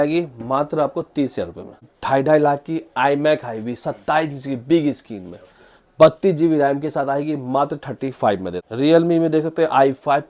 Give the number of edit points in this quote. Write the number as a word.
two